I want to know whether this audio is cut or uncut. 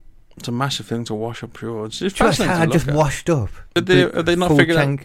cut